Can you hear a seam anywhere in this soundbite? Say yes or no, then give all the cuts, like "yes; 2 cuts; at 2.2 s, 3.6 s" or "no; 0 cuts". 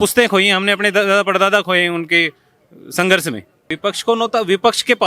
yes; 1 cut; at 3.6 s